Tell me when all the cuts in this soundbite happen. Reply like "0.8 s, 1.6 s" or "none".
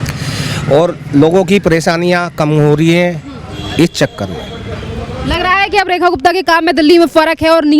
none